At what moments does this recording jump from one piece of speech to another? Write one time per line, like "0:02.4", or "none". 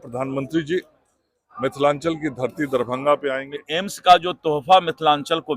0:03.6